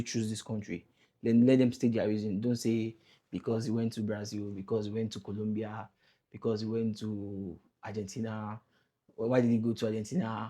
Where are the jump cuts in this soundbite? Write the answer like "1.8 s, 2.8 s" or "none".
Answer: none